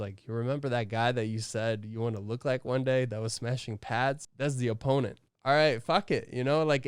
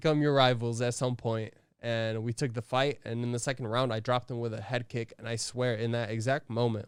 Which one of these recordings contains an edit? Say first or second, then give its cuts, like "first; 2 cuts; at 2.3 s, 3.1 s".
first; 2 cuts; at 4.3 s, 5.3 s